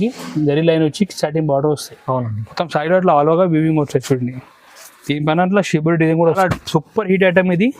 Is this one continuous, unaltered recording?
no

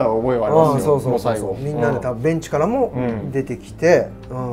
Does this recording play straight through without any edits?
yes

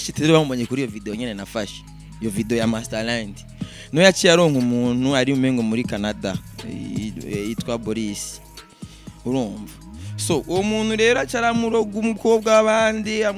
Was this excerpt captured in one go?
yes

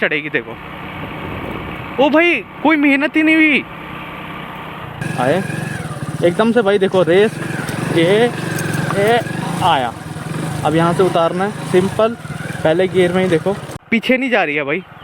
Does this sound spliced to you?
yes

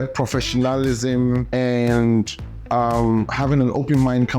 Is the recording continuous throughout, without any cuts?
no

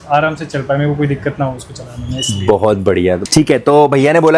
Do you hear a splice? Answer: no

